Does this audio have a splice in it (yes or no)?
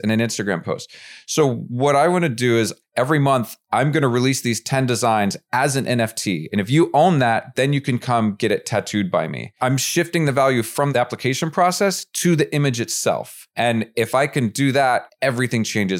yes